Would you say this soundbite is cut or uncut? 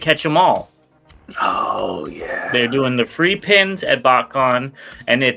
uncut